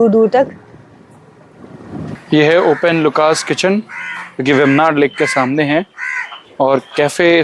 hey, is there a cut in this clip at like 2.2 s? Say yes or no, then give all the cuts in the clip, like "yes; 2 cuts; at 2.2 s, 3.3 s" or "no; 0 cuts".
yes; 1 cut; at 2.2 s